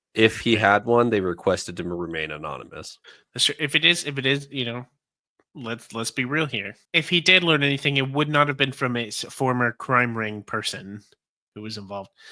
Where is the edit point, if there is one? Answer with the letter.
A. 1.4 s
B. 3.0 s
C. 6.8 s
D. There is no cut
C